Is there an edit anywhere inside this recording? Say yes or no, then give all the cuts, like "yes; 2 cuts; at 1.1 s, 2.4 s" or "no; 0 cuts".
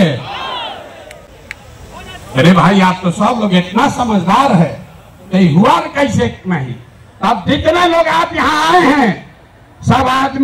no; 0 cuts